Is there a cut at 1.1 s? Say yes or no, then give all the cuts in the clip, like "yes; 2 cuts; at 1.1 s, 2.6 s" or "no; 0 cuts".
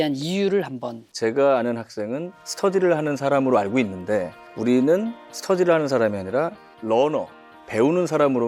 yes; 1 cut; at 1.1 s